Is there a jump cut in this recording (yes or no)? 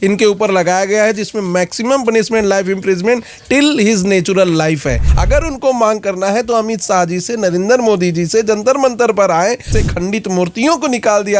yes